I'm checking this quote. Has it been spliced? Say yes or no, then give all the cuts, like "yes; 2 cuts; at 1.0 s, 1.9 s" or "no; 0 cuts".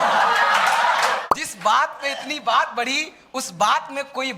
yes; 1 cut; at 1.3 s